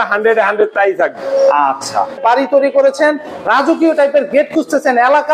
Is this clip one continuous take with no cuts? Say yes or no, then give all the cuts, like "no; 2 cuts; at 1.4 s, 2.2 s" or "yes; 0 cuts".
no; 1 cut; at 2.2 s